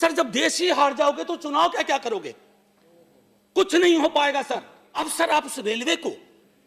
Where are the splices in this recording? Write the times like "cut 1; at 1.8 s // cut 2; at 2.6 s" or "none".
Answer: cut 1; at 5.1 s